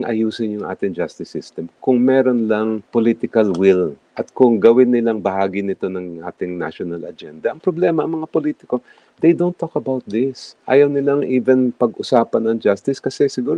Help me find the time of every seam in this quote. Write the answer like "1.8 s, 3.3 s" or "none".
2.8 s